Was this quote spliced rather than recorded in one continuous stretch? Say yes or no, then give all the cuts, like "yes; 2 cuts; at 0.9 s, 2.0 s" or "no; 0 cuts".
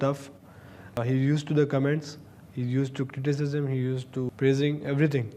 yes; 2 cuts; at 1.0 s, 4.3 s